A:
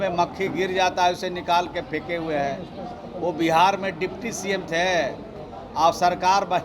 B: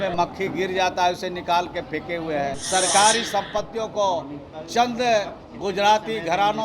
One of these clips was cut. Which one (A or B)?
B